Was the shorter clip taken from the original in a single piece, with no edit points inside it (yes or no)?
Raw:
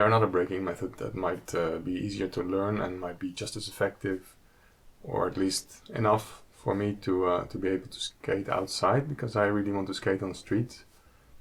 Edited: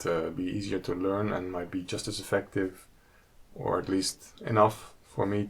yes